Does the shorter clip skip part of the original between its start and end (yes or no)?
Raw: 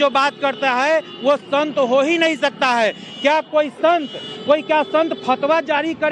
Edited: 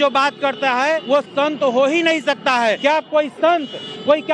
yes